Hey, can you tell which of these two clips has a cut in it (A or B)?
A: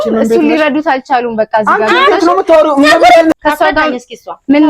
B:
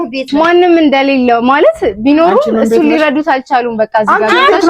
A